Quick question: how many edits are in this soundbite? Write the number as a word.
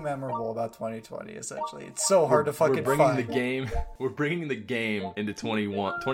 two